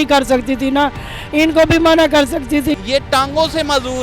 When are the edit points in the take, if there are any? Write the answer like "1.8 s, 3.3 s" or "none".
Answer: 2.8 s

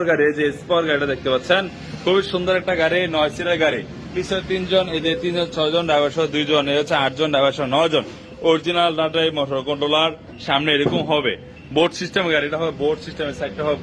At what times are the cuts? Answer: none

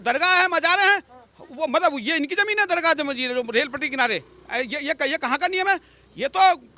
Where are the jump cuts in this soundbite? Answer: none

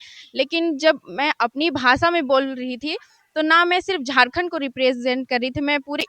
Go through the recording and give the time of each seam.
none

